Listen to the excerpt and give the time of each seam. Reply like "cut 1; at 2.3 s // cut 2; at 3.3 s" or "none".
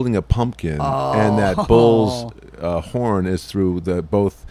none